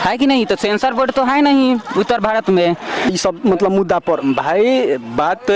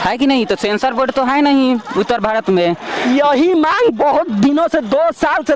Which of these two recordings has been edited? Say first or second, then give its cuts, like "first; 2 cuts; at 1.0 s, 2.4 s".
first; 1 cut; at 3.1 s